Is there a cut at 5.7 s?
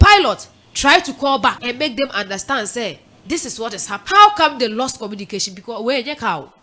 no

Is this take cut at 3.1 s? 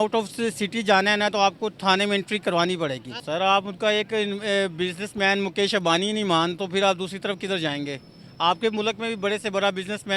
yes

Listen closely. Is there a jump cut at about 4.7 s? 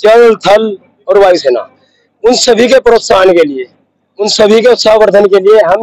no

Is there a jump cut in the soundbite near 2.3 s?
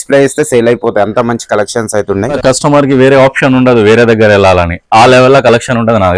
yes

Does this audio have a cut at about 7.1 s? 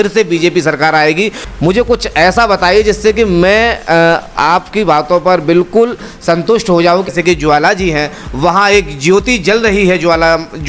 yes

